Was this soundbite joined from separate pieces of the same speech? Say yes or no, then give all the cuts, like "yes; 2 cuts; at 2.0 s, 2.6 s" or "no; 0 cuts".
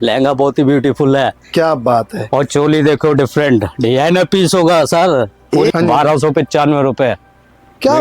yes; 1 cut; at 5.7 s